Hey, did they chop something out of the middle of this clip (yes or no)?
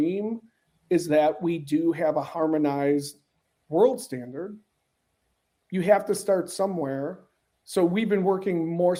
no